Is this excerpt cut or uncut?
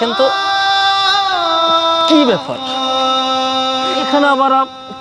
uncut